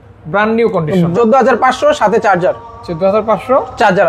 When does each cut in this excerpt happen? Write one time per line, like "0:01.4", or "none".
0:01.1